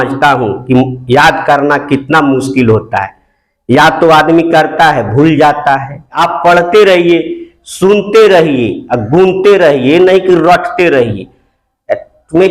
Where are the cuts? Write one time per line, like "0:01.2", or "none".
0:06.2

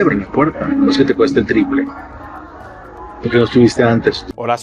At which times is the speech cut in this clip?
none

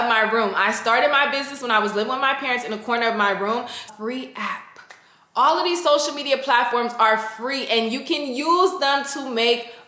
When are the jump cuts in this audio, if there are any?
0:03.8

